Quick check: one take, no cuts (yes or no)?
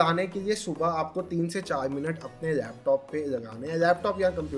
yes